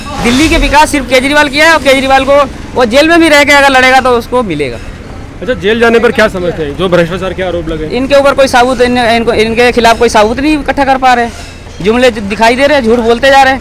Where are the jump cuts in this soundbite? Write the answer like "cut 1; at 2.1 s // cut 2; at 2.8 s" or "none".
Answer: none